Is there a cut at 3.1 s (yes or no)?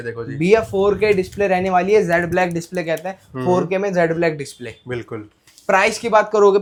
no